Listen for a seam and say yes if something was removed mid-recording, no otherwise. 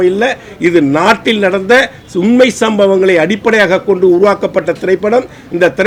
no